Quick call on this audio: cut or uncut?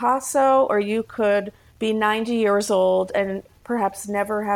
uncut